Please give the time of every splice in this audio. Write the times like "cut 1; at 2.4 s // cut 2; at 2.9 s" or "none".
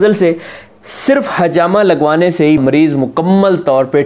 cut 1; at 2.6 s